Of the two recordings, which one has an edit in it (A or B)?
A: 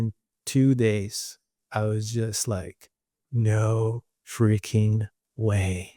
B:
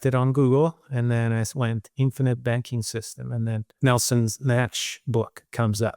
B